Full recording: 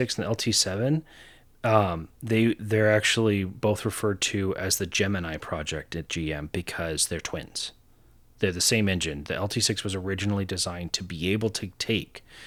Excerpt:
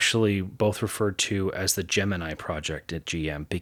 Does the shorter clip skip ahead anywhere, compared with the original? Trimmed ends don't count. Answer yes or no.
no